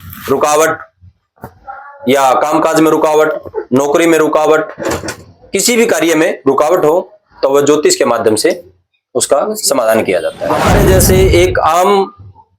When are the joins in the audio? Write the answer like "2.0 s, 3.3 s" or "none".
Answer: 10.4 s